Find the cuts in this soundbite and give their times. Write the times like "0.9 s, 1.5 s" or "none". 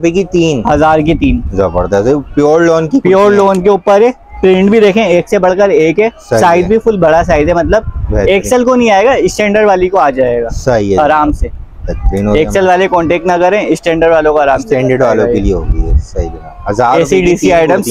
none